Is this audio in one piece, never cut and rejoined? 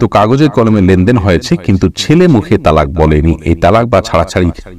yes; 0 cuts

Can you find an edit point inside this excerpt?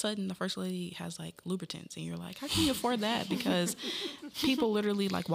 no; 0 cuts

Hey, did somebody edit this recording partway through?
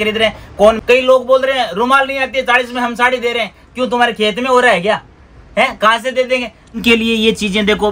yes; 2 cuts; at 0.8 s, 6.8 s

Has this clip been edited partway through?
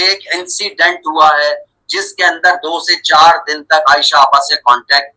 no; 0 cuts

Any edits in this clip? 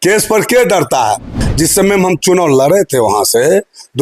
yes; 1 cut; at 1.4 s

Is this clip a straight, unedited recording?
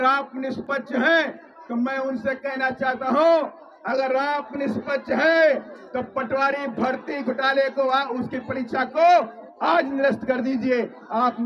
yes; 0 cuts

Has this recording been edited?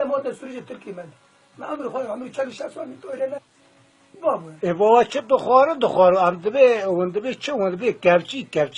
no; 0 cuts

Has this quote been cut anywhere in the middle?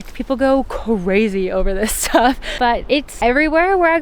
yes; 1 cut; at 2.8 s

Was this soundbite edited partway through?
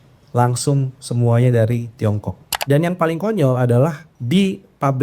yes; 2 cuts; at 2.5 s, 4.1 s

